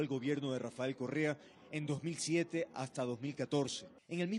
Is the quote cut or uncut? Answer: uncut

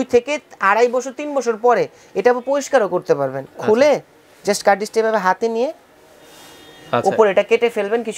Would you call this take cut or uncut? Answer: uncut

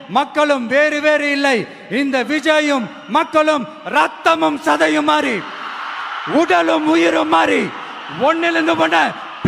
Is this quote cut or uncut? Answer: uncut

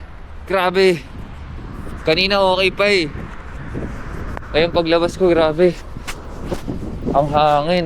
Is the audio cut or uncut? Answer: uncut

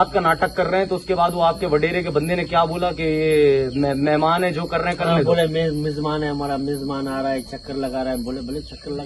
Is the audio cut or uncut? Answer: uncut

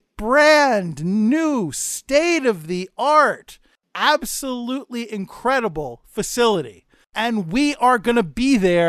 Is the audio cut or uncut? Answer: cut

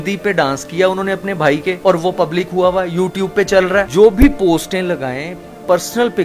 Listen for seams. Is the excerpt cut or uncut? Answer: uncut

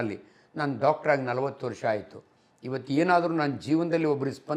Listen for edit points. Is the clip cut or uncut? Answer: uncut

